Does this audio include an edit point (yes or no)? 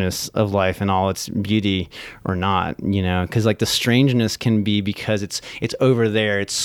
no